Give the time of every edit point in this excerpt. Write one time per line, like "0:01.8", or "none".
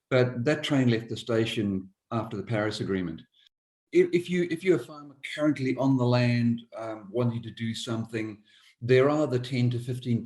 0:03.6